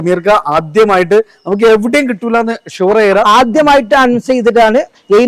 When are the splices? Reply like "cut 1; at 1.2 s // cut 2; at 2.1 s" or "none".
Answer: none